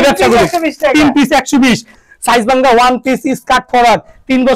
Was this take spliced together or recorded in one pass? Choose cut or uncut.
cut